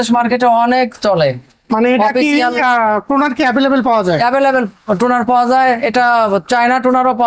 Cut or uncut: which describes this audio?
uncut